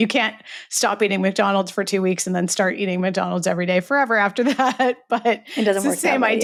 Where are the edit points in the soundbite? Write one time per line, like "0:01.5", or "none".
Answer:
none